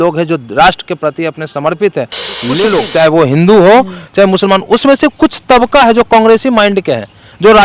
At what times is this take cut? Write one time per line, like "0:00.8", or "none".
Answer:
0:02.6